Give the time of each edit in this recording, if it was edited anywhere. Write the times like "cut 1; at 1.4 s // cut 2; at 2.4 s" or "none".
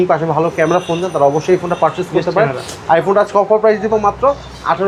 none

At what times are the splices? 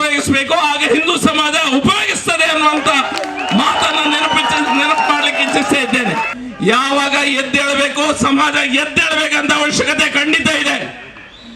cut 1; at 6.4 s

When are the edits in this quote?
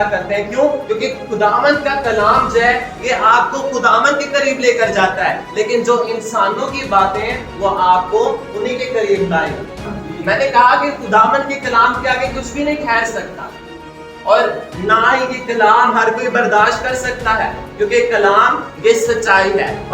cut 1; at 9.8 s

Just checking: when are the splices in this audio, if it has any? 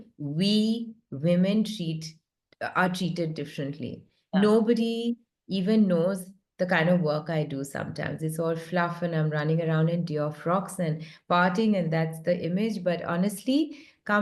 none

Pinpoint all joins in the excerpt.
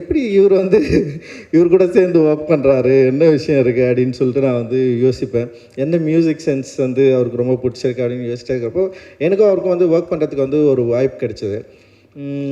none

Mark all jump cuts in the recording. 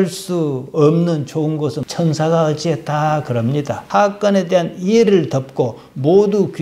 cut 1; at 1.8 s // cut 2; at 3.8 s

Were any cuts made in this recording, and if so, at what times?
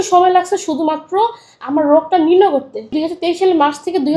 cut 1; at 2.9 s

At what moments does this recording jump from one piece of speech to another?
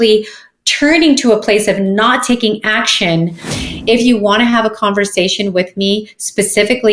cut 1; at 3.5 s

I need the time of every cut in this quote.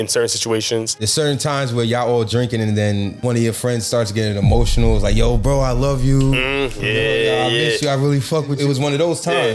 cut 1; at 1.0 s // cut 2; at 3.1 s // cut 3; at 8.5 s

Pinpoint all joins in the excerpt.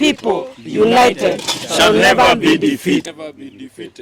cut 1; at 3.1 s

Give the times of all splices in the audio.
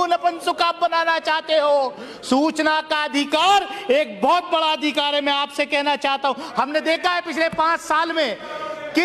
none

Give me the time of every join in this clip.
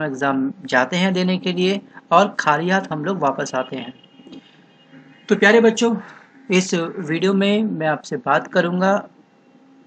cut 1; at 6.4 s

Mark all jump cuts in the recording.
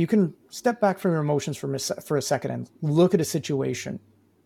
none

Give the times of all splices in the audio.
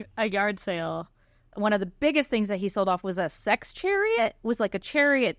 cut 1; at 1.5 s

